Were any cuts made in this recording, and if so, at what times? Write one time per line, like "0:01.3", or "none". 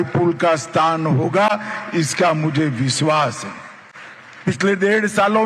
none